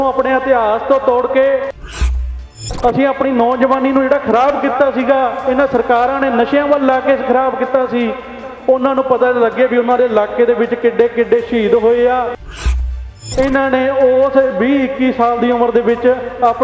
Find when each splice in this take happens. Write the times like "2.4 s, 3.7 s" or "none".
2.3 s, 12.8 s